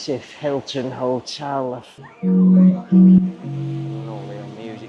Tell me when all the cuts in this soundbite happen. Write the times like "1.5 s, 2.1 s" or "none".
2.0 s

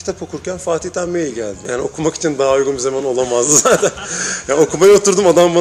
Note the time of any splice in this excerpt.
1.6 s

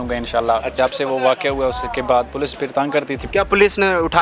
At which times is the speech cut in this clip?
0.7 s, 3.2 s

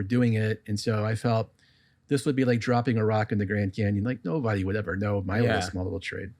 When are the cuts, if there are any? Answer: none

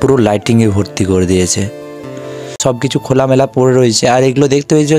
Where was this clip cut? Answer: 2.6 s

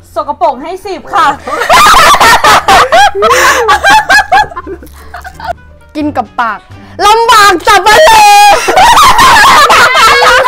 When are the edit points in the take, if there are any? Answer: none

